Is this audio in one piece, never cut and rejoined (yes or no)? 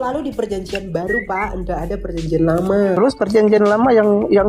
no